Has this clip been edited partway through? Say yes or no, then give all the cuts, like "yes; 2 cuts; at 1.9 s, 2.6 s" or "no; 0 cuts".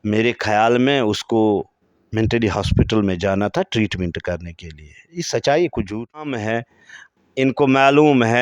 yes; 1 cut; at 6.4 s